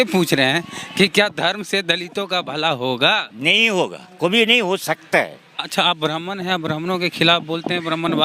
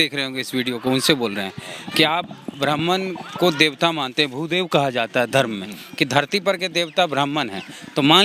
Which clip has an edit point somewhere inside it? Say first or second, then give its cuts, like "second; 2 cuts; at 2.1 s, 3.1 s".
first; 1 cut; at 5.6 s